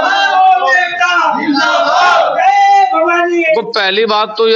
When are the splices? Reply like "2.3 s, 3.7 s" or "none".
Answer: 3.6 s